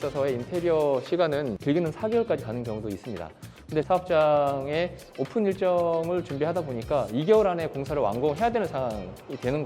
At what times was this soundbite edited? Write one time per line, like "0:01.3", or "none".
0:01.6
0:03.9